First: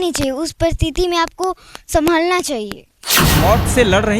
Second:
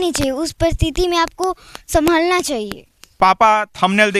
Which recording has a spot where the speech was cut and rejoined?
first; 1 cut; at 3.2 s

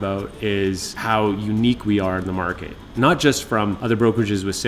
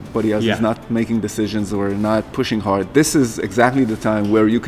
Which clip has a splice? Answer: first; 2 cuts; at 0.9 s, 3.8 s

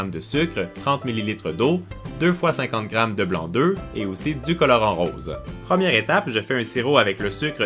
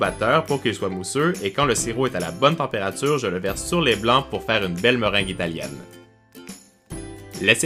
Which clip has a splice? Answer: first; 1 cut; at 3.1 s

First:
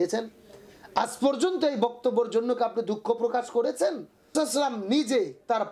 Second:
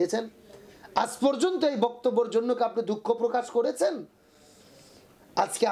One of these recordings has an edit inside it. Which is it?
first; 1 cut; at 4.3 s

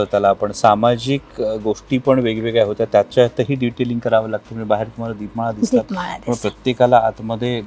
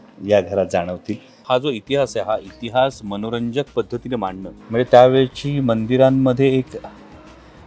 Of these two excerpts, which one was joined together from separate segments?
second; 2 cuts; at 1.4 s, 4.5 s

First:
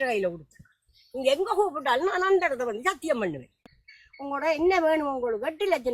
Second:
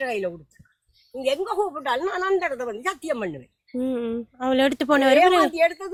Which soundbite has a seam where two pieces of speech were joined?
first; 1 cut; at 3.6 s

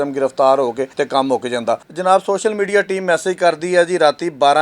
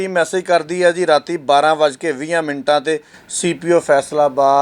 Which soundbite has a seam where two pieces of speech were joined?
first; 2 cuts; at 0.9 s, 1.9 s

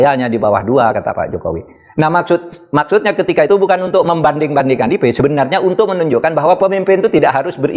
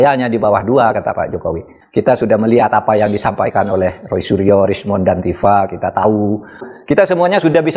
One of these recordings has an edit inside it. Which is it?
second; 2 cuts; at 1.7 s, 6.6 s

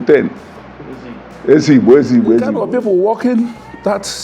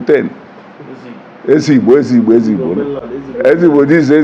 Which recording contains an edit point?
first; 1 cut; at 2.6 s

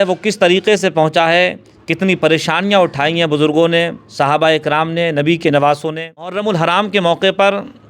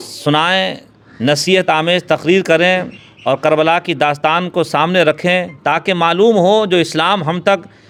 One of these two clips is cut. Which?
first; 1 cut; at 6.4 s

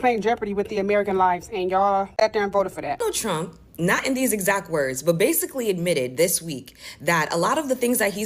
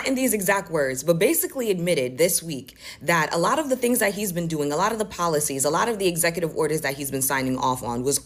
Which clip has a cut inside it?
first; 1 cut; at 3.0 s

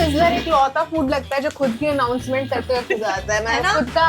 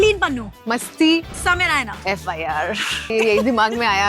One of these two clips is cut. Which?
second; 2 cuts; at 1.9 s, 3.1 s

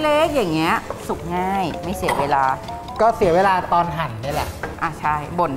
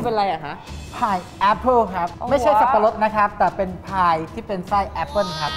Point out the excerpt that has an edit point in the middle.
first; 1 cut; at 4.6 s

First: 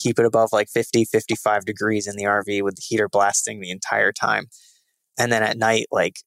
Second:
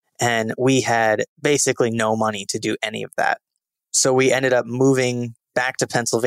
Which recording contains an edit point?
second; 1 cut; at 1.3 s

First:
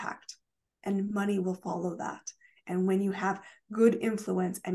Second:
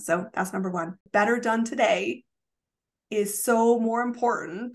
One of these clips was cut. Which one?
second; 1 cut; at 1.0 s

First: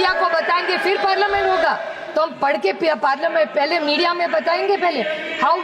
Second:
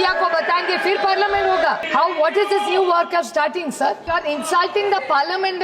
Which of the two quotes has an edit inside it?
second; 2 cuts; at 1.8 s, 4.1 s

